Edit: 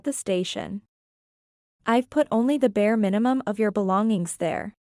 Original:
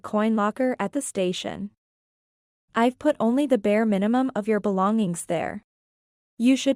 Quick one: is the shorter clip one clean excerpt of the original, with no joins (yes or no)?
yes